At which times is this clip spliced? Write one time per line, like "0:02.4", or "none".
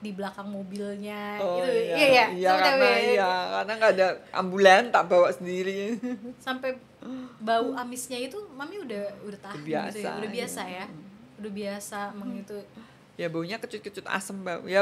none